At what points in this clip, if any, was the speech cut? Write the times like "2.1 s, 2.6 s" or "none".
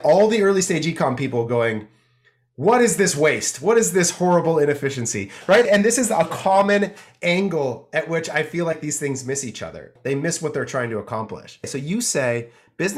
5.7 s, 9.8 s, 11.7 s